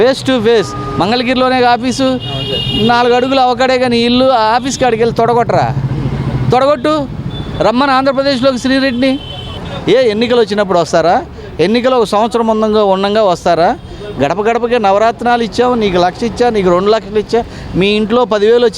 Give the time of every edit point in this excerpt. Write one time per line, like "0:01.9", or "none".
0:09.7

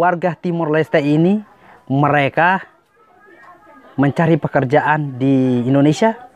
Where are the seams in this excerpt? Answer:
none

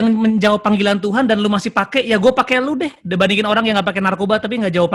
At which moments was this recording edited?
none

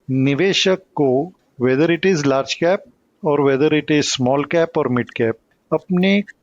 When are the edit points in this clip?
0:01.4
0:05.5

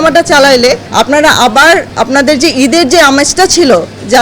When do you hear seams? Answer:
0:00.9
0:01.9

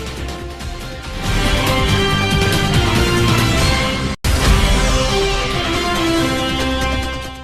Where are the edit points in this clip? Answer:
0:04.2

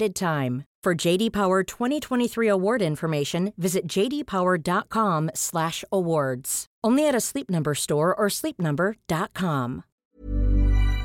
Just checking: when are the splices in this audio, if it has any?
0:10.0

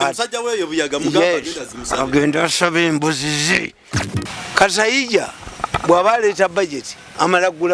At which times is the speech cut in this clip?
0:03.9

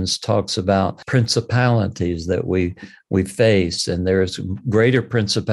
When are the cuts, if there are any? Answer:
0:01.0

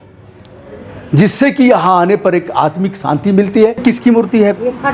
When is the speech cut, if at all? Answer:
0:03.8

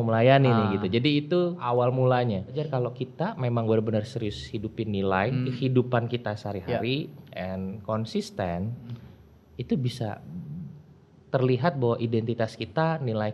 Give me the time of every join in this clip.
0:01.6
0:02.6
0:05.5

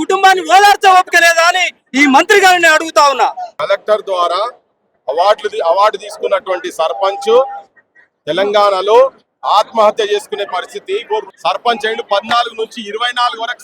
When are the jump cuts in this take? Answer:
0:03.5
0:11.3

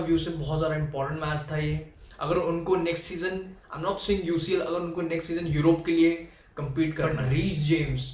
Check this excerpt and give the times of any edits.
0:07.1

